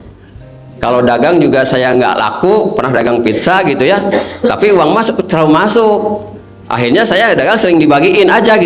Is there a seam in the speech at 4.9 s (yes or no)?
no